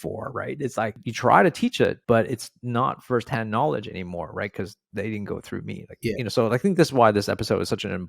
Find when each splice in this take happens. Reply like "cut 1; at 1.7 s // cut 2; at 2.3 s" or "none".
cut 1; at 1.0 s // cut 2; at 2.0 s